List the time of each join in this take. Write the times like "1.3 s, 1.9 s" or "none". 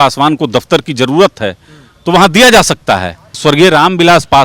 3.4 s